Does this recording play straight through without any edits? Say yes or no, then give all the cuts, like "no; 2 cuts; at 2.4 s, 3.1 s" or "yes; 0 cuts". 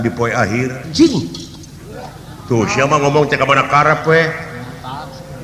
no; 1 cut; at 0.9 s